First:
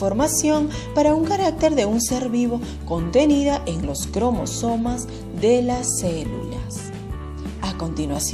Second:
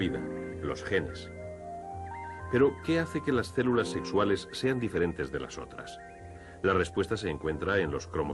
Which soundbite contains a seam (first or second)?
second